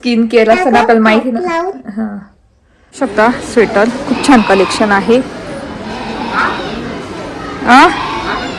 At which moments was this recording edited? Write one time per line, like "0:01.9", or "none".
0:02.8